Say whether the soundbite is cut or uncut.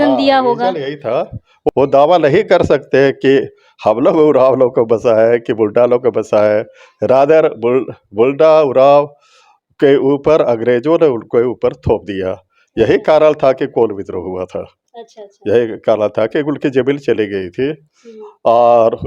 cut